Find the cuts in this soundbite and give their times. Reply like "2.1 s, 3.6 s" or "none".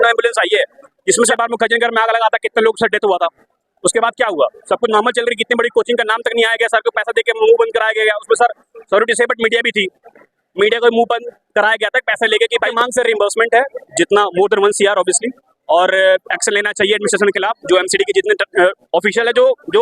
1.3 s, 12.7 s